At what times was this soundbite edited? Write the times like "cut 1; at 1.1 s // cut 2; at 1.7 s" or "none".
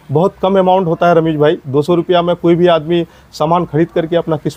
none